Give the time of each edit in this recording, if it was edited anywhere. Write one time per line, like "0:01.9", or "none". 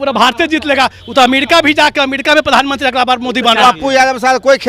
0:03.6